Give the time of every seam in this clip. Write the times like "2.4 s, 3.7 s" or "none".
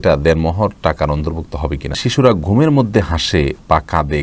2.0 s

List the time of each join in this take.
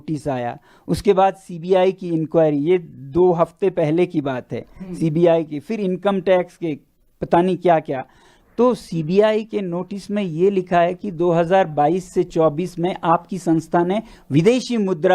none

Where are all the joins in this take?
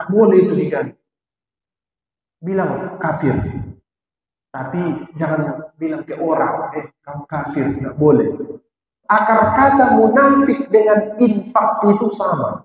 8.9 s

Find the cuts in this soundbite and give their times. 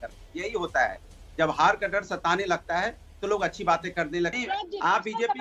4.4 s

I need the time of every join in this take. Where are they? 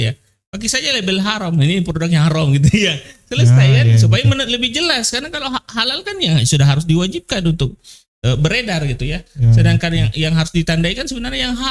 none

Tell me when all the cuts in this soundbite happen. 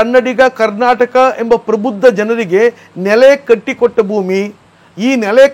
none

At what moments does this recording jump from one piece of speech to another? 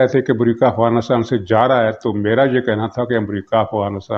none

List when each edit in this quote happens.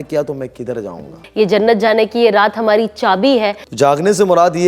1.2 s, 3.6 s

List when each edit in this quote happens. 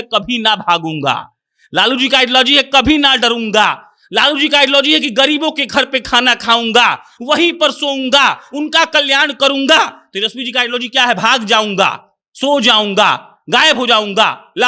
none

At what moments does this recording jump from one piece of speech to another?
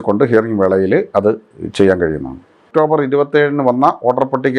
2.4 s

